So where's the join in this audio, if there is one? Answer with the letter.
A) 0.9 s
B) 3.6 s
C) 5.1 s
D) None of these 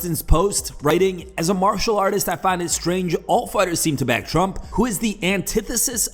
A